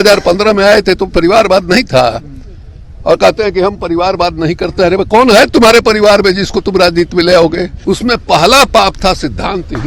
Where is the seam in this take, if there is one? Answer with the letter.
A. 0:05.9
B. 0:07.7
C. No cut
B